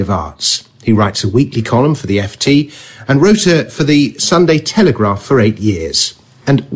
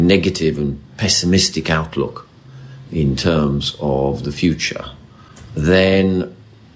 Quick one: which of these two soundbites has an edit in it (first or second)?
first